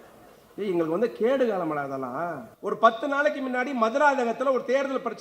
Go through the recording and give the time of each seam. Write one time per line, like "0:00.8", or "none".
0:02.5